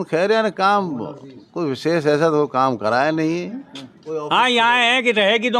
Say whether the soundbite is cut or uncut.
cut